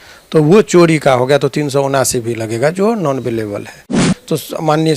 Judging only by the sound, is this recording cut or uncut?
cut